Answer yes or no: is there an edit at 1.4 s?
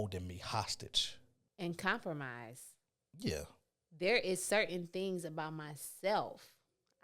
yes